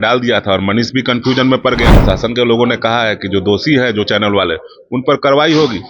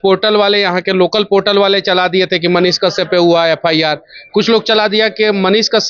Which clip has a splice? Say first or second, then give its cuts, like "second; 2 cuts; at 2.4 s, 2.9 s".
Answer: first; 1 cut; at 1.9 s